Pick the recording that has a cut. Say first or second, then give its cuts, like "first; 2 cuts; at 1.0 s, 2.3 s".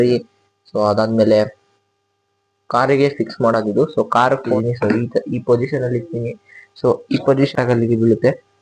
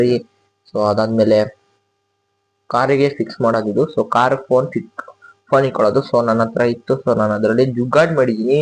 first; 2 cuts; at 4.5 s, 7.5 s